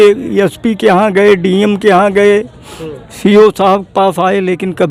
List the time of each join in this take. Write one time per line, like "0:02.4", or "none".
none